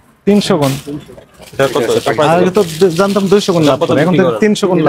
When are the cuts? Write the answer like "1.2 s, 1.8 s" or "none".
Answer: none

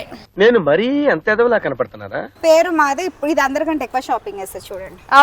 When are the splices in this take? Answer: 2.2 s

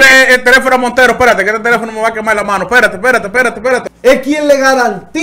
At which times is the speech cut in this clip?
3.8 s

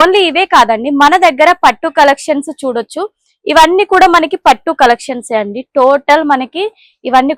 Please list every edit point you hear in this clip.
none

